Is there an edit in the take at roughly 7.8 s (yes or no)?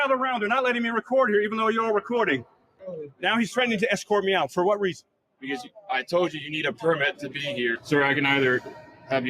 yes